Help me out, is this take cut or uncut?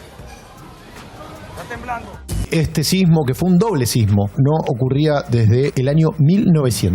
uncut